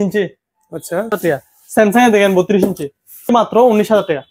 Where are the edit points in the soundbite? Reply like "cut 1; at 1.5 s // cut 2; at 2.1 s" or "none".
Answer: cut 1; at 1.2 s // cut 2; at 3.3 s